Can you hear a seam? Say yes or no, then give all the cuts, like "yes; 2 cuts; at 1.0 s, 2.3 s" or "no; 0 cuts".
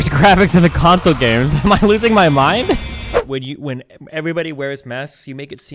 yes; 1 cut; at 3.2 s